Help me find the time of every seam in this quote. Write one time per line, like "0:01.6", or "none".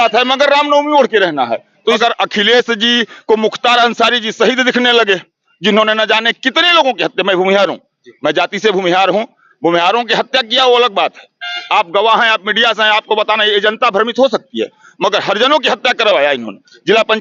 0:02.0